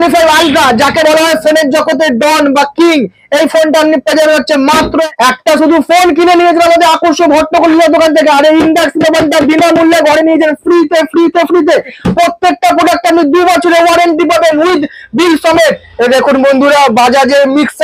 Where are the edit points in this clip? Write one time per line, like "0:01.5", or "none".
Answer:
0:05.1
0:12.0